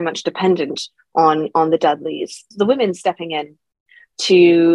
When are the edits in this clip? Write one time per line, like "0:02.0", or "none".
0:02.5